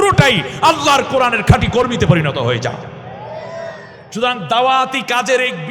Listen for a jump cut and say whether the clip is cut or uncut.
uncut